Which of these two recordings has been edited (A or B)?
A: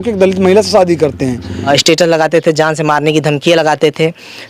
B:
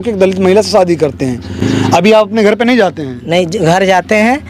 A